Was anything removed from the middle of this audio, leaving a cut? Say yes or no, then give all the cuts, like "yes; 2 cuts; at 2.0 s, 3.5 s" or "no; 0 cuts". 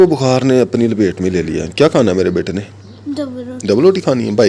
no; 0 cuts